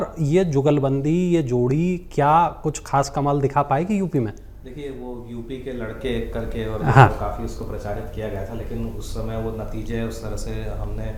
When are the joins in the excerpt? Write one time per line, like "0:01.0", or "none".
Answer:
none